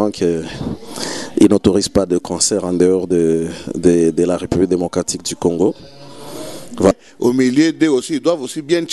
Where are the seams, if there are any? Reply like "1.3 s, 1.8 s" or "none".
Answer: 6.9 s